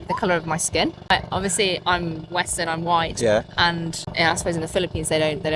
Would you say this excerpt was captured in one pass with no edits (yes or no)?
no